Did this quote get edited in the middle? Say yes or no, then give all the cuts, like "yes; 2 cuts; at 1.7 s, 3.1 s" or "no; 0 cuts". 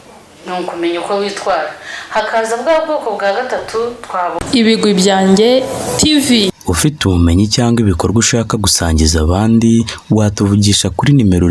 yes; 1 cut; at 4.3 s